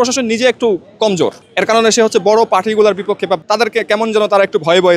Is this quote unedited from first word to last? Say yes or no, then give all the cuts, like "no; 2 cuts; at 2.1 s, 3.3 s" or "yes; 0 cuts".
no; 2 cuts; at 1.4 s, 3.4 s